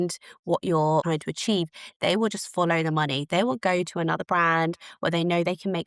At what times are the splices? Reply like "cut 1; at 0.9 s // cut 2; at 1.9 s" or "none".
cut 1; at 1.0 s